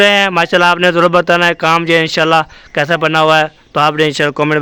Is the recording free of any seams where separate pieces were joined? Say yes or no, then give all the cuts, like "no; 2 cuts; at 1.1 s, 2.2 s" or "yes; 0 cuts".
yes; 0 cuts